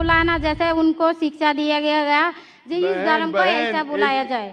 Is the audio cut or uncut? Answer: uncut